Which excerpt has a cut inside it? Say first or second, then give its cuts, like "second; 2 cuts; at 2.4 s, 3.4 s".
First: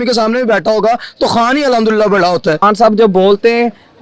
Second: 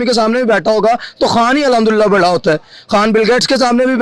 first; 1 cut; at 2.6 s